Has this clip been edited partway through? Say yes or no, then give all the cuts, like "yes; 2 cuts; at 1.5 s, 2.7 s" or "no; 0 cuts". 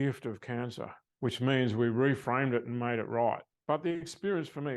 yes; 2 cuts; at 1.0 s, 3.5 s